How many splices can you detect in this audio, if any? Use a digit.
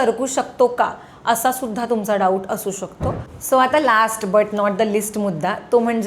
1